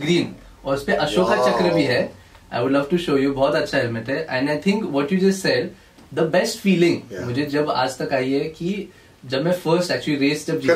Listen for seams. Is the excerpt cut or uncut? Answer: uncut